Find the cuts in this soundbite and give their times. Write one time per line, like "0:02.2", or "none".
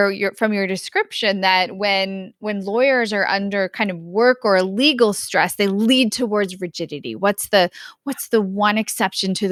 none